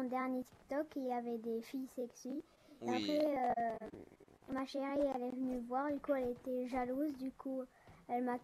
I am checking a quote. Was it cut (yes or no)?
no